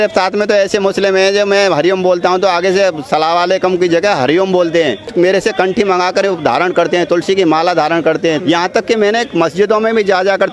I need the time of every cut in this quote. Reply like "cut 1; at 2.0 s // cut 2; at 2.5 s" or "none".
cut 1; at 5.1 s // cut 2; at 8.4 s